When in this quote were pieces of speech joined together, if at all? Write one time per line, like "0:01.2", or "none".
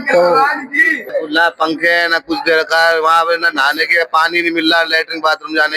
0:01.1